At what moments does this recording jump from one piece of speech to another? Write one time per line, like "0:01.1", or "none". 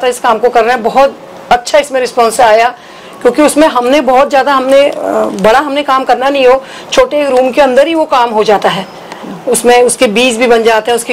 none